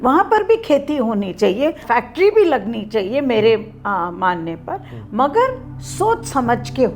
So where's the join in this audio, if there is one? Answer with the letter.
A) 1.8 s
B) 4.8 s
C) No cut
A